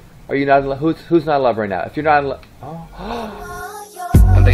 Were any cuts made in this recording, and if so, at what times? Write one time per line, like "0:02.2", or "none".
0:03.4